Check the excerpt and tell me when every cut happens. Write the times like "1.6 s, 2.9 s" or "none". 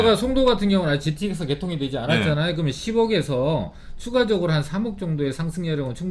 none